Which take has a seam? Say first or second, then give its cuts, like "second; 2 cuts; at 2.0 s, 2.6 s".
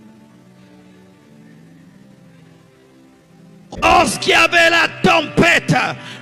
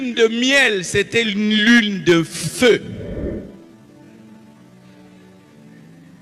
first; 1 cut; at 3.8 s